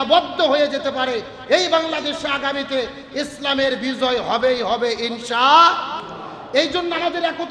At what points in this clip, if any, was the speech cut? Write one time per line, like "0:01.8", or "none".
none